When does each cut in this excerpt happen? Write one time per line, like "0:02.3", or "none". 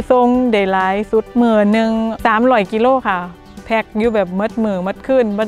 0:01.3
0:02.1